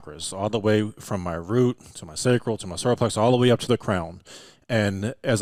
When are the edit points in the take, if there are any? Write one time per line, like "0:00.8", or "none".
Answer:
none